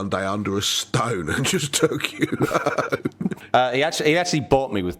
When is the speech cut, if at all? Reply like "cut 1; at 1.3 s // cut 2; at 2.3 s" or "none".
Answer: cut 1; at 3.4 s